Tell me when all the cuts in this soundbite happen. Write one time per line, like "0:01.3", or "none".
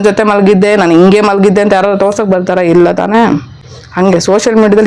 none